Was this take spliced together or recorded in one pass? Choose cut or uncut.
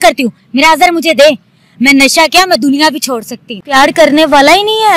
cut